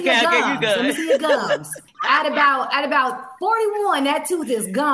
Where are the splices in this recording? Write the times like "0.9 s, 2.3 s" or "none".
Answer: 1.9 s